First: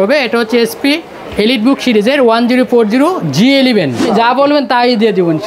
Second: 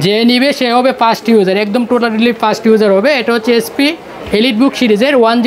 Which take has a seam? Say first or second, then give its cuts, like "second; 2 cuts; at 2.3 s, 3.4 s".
first; 1 cut; at 4.0 s